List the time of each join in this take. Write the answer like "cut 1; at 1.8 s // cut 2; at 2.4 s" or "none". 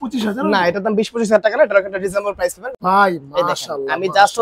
cut 1; at 2.7 s